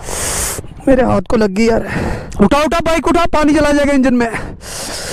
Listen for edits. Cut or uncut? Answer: cut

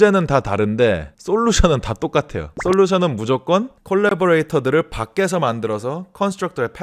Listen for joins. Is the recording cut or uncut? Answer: uncut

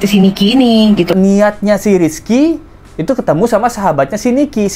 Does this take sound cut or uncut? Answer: cut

